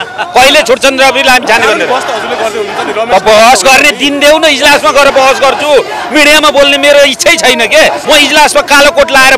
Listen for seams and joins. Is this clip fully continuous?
no; 1 cut; at 8.0 s

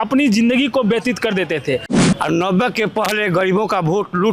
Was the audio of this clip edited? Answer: yes; 1 cut; at 2.1 s

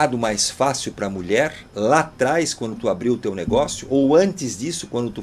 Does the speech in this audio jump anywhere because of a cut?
no; 0 cuts

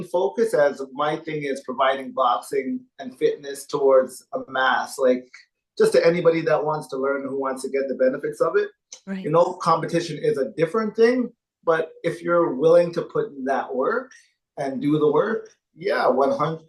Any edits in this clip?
no; 0 cuts

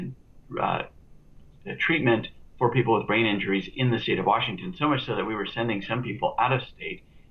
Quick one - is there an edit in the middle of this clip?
no; 0 cuts

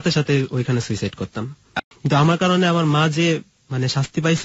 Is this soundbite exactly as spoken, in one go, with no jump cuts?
no; 1 cut; at 1.7 s

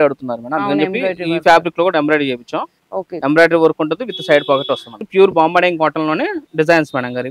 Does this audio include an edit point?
yes; 1 cut; at 5.0 s

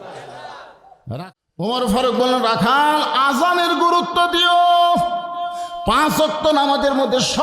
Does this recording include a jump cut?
yes; 1 cut; at 1.0 s

